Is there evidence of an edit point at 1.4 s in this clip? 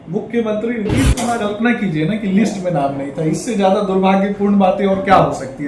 yes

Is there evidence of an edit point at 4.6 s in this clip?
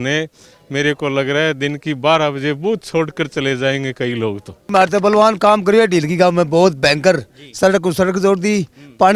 yes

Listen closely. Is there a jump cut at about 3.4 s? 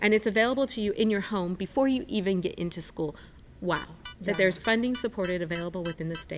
yes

